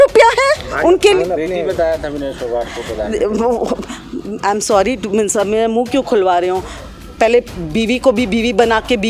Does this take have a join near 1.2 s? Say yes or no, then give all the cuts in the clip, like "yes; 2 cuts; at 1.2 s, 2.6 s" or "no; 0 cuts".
yes; 1 cut; at 1.2 s